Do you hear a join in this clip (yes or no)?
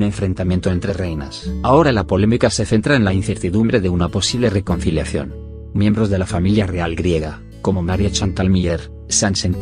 yes